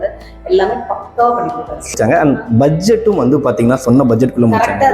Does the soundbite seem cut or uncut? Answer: cut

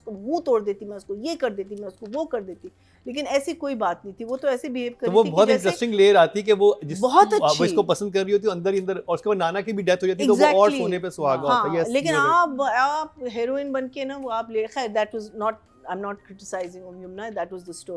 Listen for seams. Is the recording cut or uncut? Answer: uncut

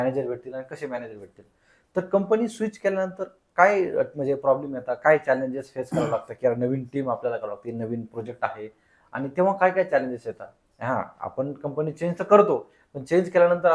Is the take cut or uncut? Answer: uncut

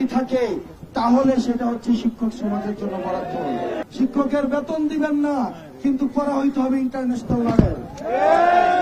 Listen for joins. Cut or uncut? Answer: cut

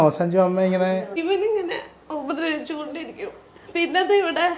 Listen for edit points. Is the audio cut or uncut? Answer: cut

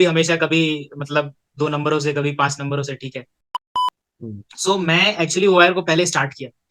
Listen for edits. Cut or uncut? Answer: cut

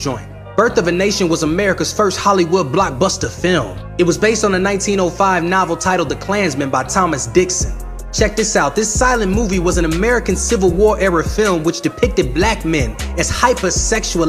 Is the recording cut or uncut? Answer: uncut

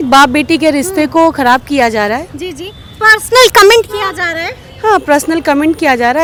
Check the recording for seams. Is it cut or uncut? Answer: uncut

